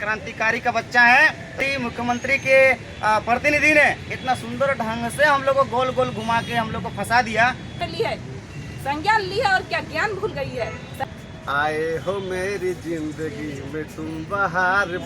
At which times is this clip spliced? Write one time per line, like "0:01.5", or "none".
0:01.7
0:07.8
0:11.0